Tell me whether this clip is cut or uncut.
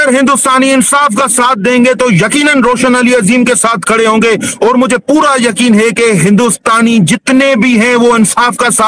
uncut